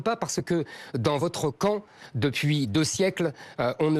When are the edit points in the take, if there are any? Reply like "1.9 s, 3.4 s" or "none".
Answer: none